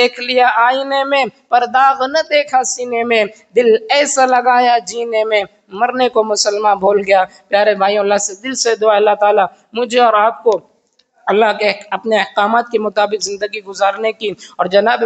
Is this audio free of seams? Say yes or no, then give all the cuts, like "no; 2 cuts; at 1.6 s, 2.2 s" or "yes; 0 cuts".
yes; 0 cuts